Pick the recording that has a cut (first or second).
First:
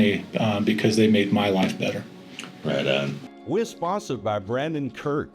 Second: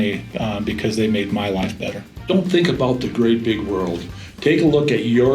second